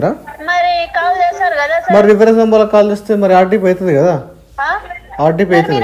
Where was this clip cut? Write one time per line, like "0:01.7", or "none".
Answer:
none

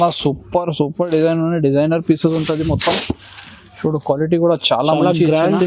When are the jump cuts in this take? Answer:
none

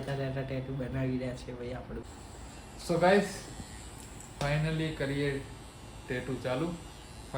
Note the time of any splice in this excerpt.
0:02.1

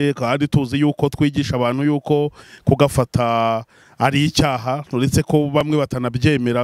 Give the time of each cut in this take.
none

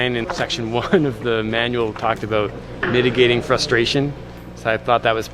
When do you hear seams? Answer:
none

